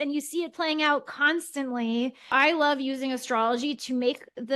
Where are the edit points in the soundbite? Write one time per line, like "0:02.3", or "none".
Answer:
0:02.3

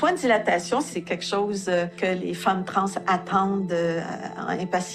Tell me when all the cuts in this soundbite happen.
0:01.9

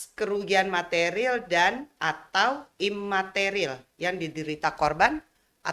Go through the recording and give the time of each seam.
none

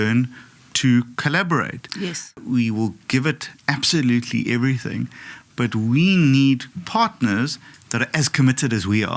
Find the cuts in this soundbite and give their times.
0:02.3
0:06.7

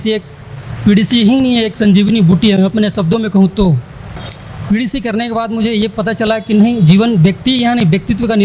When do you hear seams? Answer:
none

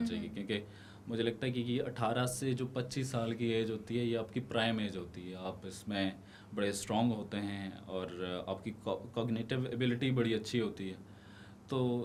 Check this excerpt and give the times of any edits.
none

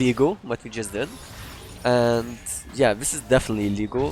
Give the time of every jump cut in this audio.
none

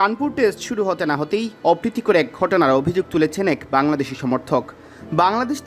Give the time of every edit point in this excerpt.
none

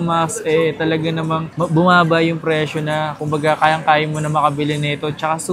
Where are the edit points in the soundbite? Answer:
none

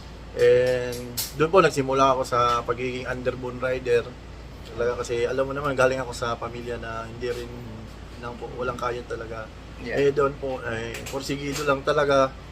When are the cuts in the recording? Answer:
0:04.7
0:08.2

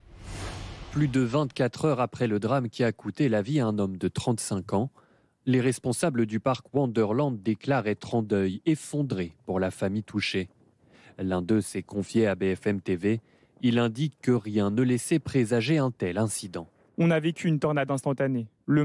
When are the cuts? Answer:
0:00.9

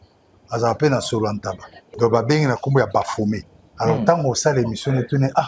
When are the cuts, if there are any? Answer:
0:01.8

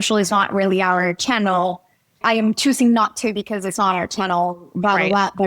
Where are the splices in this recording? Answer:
0:02.2

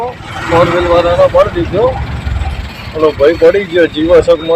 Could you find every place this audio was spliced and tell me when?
none

